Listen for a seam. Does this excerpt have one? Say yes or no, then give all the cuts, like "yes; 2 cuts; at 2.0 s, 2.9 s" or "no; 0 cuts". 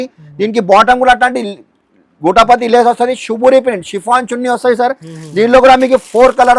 no; 0 cuts